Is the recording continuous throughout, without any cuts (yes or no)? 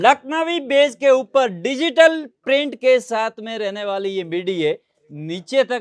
yes